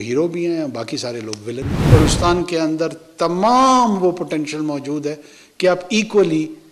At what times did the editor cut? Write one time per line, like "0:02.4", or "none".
0:01.8